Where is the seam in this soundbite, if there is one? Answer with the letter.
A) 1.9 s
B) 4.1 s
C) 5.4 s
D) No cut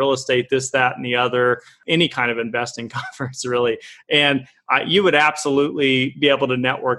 D